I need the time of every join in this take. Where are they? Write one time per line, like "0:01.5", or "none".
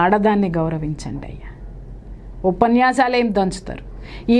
none